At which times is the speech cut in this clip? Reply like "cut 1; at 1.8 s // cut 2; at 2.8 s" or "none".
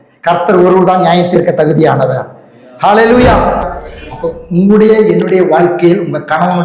cut 1; at 3.6 s